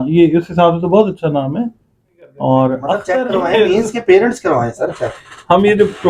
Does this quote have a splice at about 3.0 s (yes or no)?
yes